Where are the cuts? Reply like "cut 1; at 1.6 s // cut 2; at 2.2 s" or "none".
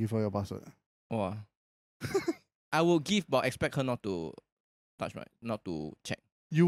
cut 1; at 2.5 s